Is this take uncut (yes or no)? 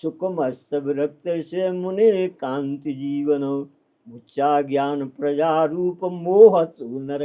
yes